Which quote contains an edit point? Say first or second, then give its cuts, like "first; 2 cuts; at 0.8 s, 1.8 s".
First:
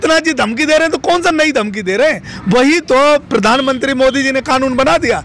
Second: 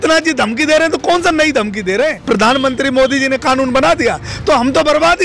second; 1 cut; at 2.2 s